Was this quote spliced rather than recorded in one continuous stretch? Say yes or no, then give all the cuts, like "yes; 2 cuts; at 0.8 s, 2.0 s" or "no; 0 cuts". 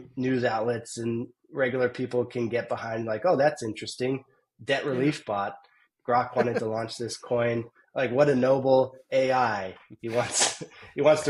no; 0 cuts